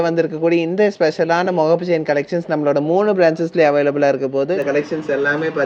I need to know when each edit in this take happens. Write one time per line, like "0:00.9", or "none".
0:04.6